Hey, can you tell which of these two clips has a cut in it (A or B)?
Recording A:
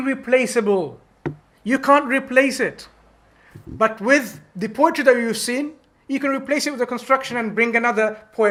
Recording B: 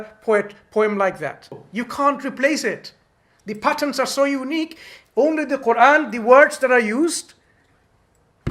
B